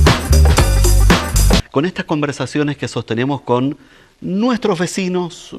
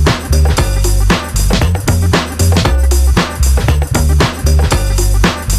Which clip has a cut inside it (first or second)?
first